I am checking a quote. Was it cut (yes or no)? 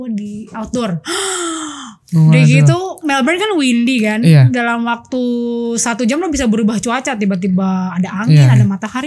no